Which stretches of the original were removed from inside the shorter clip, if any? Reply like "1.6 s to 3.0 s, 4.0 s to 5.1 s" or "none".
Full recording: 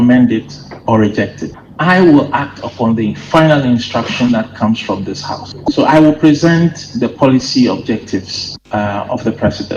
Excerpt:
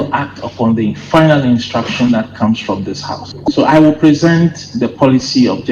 none